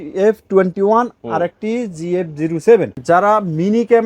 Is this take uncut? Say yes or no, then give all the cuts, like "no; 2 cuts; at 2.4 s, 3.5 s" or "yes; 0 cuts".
no; 1 cut; at 2.9 s